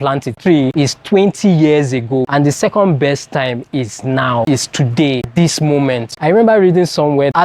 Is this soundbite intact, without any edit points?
yes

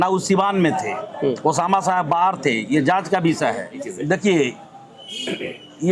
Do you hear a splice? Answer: yes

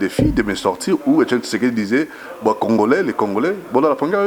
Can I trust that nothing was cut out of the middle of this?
yes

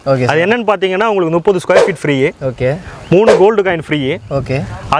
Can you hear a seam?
no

